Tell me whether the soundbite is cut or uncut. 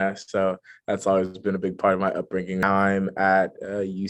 cut